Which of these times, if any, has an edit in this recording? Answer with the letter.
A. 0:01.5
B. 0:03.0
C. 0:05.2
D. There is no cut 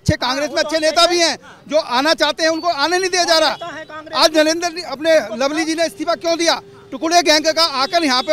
D